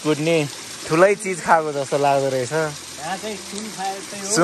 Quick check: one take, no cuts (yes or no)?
yes